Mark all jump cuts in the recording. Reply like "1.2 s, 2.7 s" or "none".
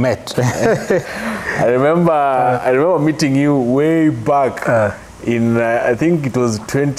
0.9 s